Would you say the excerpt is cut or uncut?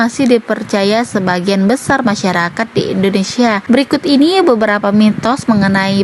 cut